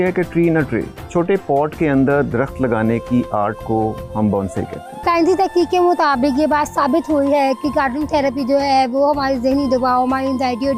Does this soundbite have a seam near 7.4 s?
no; 1 cut; at 5.0 s

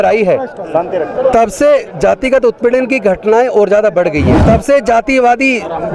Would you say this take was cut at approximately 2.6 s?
no; 1 cut; at 4.4 s

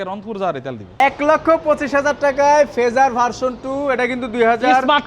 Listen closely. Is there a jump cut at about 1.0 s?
yes; 1 cut; at 1.0 s

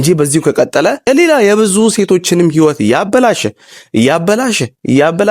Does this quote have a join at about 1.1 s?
yes; 1 cut; at 1.1 s

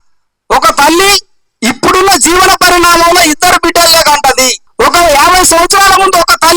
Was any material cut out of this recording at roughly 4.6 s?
yes; 1 cut; at 4.6 s

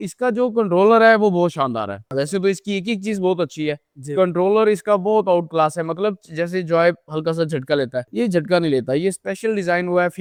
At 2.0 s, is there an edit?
no; 0 cuts

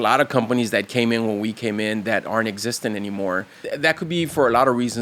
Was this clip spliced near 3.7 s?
yes; 1 cut; at 3.7 s

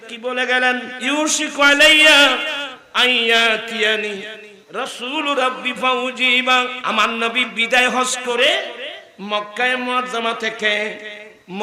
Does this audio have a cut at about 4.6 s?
no; 2 cuts; at 0.9 s, 6.8 s

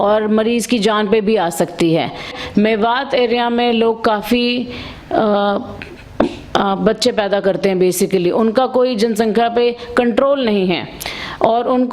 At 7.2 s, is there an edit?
no; 1 cut; at 2.3 s

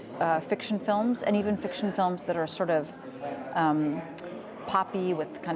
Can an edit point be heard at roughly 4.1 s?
yes; 1 cut; at 4.1 s

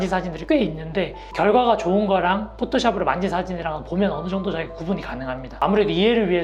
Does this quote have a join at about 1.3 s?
no; 0 cuts

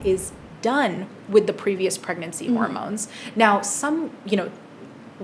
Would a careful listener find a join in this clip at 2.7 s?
no; 0 cuts

